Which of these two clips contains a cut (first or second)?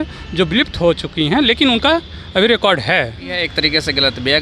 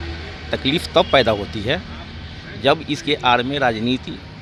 first